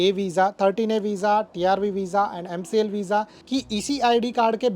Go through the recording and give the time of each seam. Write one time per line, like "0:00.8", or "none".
0:03.4